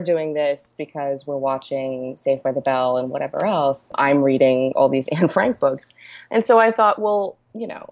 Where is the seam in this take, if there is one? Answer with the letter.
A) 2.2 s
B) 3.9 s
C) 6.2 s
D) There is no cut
B